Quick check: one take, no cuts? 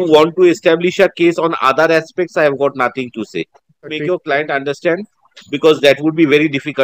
no; 1 cut; at 4.0 s

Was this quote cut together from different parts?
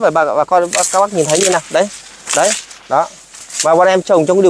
no; 0 cuts

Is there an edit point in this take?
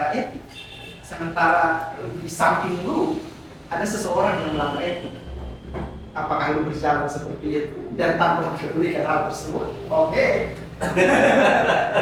no; 0 cuts

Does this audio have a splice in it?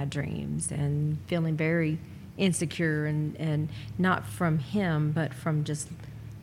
no; 0 cuts

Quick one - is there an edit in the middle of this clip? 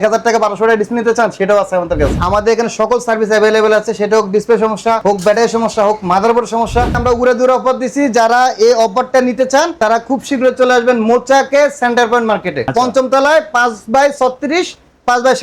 yes; 3 cuts; at 2.1 s, 7.0 s, 12.7 s

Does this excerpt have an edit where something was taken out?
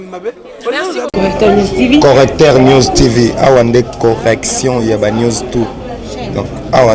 yes; 1 cut; at 1.1 s

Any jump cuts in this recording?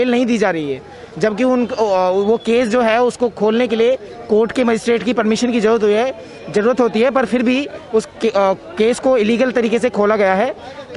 no; 0 cuts

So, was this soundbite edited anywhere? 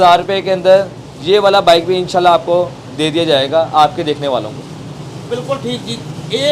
no; 0 cuts

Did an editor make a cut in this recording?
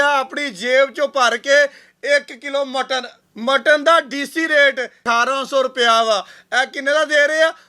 yes; 2 cuts; at 3.2 s, 5.0 s

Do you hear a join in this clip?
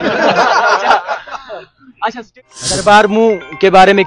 yes; 1 cut; at 2.3 s

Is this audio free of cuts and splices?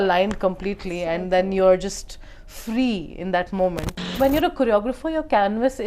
no; 1 cut; at 4.1 s

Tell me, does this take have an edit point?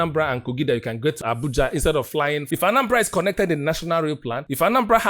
yes; 2 cuts; at 1.2 s, 2.5 s

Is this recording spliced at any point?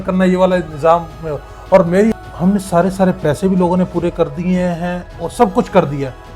yes; 1 cut; at 2.1 s

